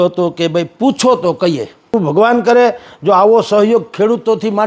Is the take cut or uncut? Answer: cut